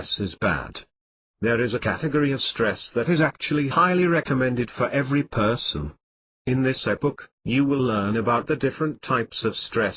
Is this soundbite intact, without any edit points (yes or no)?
yes